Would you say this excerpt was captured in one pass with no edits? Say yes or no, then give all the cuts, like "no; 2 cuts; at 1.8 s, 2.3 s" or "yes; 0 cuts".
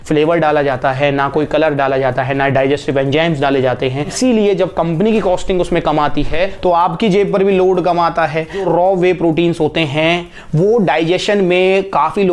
no; 2 cuts; at 4.1 s, 8.6 s